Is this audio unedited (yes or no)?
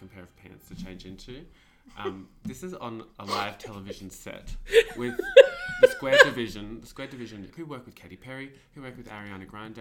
no